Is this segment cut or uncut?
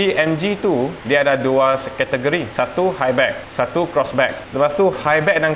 cut